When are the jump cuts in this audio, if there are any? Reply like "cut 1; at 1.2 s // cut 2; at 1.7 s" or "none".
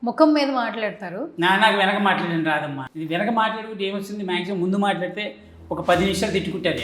cut 1; at 2.8 s